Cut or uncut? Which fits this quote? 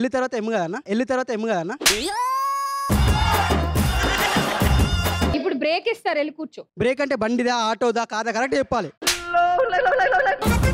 uncut